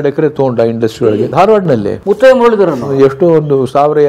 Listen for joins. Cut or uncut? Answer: cut